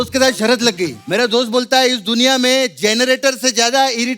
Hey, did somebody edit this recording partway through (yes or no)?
yes